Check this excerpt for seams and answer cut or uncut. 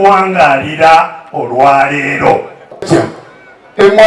cut